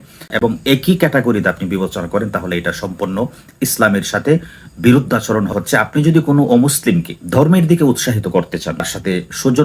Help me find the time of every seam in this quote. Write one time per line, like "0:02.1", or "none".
0:05.5
0:08.9